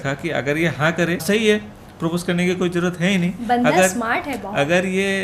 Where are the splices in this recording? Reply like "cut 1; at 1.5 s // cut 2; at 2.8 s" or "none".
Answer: cut 1; at 1.2 s